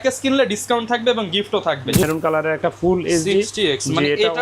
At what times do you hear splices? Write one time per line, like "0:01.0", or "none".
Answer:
0:02.0

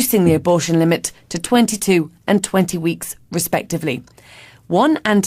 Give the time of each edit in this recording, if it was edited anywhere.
0:01.1

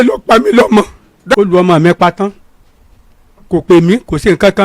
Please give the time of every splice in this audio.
0:01.4

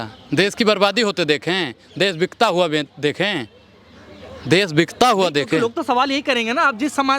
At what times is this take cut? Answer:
none

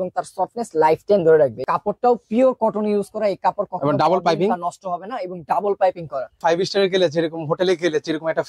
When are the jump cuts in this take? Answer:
0:01.6
0:06.4

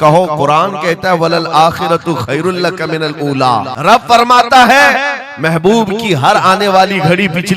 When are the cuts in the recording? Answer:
0:03.7

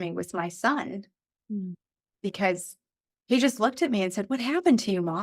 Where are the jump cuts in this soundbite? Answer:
0:03.2

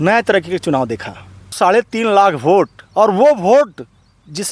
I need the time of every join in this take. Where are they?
0:01.5

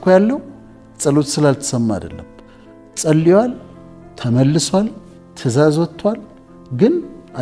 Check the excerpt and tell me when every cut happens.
none

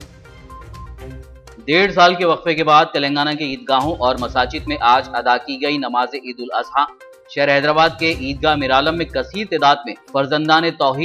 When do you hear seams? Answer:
0:01.0

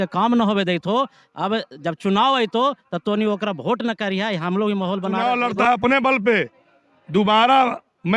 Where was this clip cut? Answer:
0:05.2

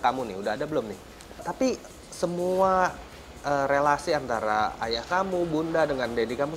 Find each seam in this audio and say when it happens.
0:01.5

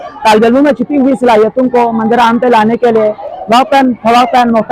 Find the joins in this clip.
none

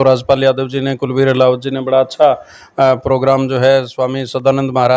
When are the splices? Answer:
none

